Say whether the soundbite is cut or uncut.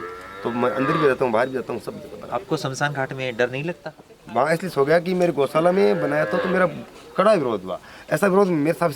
cut